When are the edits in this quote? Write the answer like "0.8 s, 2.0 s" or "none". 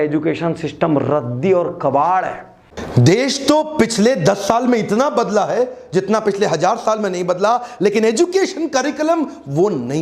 2.7 s